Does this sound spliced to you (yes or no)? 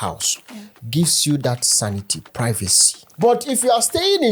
yes